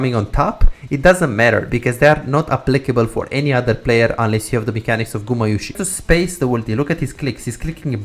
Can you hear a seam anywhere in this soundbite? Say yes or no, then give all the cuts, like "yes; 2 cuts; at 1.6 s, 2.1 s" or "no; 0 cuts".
yes; 1 cut; at 5.8 s